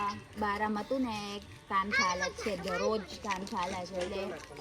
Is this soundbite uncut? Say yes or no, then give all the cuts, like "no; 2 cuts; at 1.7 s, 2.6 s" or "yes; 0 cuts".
yes; 0 cuts